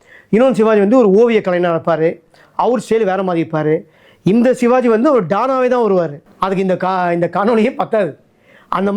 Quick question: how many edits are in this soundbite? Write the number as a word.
one